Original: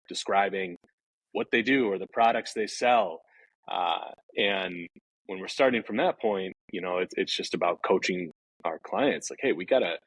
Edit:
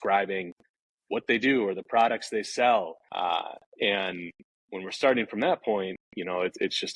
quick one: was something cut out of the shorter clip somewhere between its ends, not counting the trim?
yes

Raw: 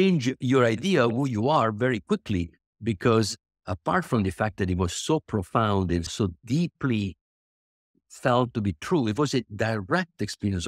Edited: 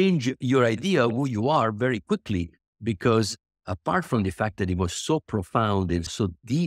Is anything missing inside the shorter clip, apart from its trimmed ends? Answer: no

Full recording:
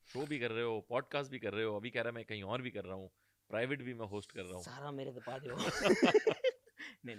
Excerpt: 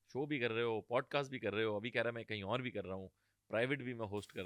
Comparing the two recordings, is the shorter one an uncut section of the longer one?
yes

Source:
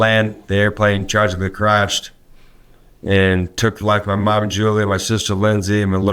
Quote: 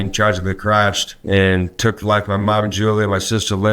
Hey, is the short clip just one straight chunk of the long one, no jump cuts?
no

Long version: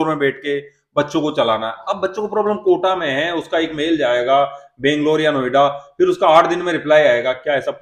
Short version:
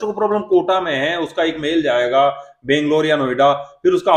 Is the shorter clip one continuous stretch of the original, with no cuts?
yes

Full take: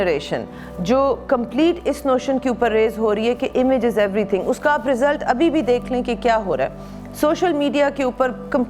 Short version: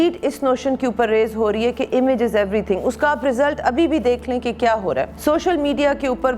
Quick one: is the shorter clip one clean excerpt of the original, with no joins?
no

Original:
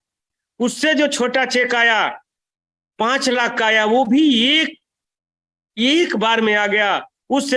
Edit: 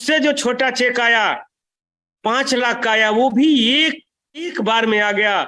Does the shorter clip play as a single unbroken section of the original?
no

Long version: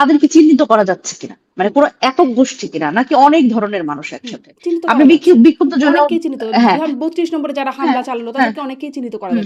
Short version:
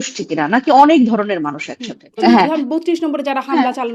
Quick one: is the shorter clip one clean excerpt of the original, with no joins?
no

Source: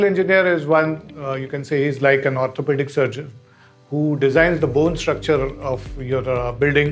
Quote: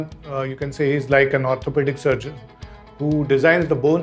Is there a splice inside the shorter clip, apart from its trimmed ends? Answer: no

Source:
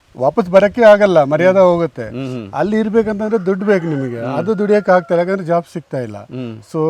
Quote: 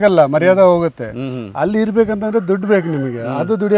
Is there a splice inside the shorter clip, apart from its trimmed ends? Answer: no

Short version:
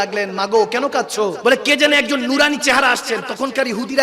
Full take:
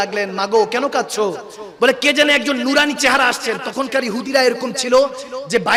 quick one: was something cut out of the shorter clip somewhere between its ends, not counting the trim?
yes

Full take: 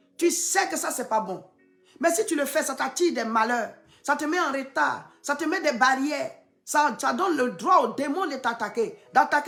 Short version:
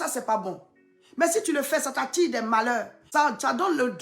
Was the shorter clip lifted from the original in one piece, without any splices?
no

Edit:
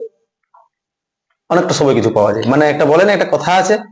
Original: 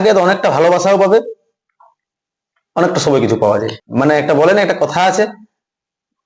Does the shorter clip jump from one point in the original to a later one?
yes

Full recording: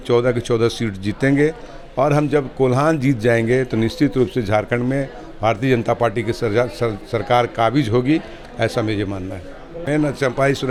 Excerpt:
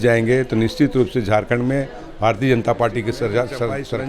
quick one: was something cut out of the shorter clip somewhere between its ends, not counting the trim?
no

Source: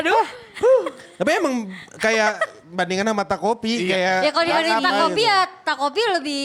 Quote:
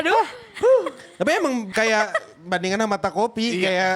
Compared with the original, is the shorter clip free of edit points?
no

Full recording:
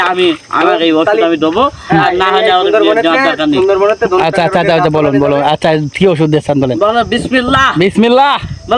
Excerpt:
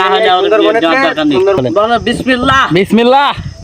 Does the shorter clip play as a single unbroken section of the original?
no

